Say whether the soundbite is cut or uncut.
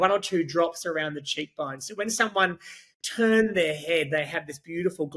uncut